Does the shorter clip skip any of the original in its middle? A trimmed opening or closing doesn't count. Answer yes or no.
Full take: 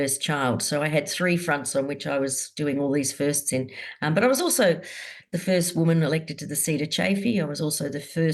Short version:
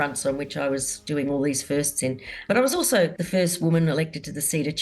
yes